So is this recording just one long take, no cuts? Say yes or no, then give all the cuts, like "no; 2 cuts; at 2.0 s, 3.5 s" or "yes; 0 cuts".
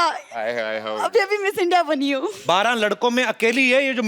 no; 1 cut; at 2.3 s